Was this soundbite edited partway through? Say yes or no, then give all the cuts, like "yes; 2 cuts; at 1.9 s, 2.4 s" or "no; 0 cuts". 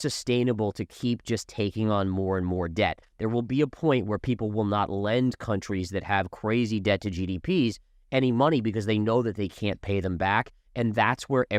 no; 0 cuts